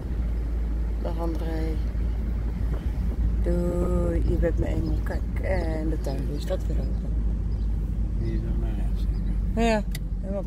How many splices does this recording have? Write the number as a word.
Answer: zero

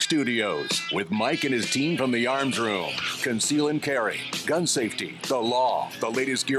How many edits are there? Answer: zero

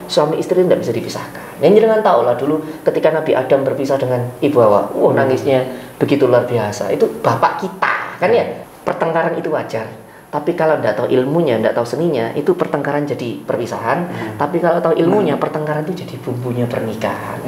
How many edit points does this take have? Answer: one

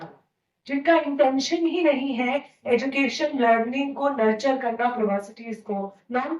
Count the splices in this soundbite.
one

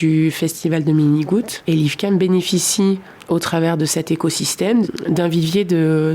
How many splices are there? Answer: three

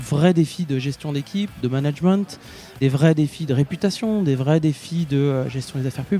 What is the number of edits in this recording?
zero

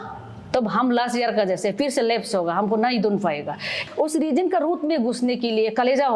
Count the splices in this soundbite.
one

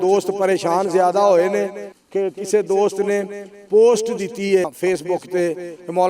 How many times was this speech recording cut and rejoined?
one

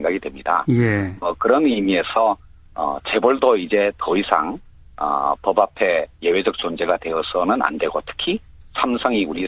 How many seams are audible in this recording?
one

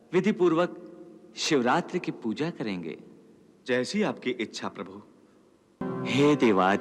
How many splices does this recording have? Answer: one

